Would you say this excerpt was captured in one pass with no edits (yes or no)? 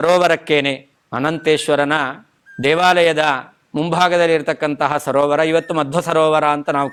yes